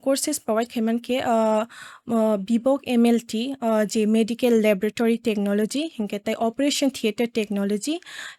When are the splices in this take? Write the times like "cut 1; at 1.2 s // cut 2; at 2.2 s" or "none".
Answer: none